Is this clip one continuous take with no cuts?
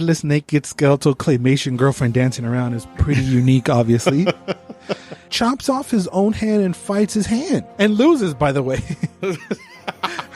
no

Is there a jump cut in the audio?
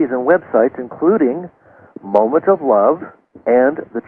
yes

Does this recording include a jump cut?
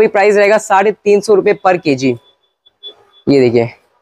no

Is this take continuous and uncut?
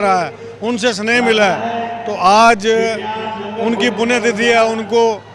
yes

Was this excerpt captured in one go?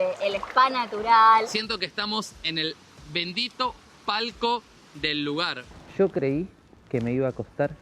no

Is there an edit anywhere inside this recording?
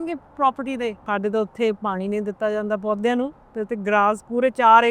yes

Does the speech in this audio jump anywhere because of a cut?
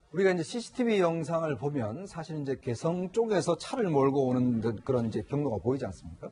no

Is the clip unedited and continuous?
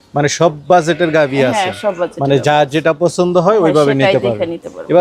yes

